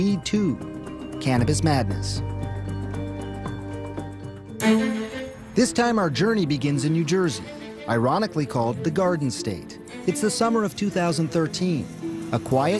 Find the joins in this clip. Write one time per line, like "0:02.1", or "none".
0:01.1